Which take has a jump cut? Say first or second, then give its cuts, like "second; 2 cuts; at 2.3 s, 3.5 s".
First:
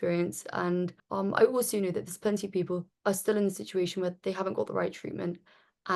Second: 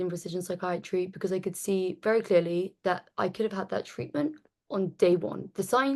first; 2 cuts; at 1.0 s, 2.9 s